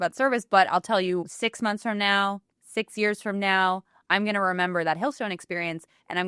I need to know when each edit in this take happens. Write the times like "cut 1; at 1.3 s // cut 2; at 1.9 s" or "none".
cut 1; at 1.4 s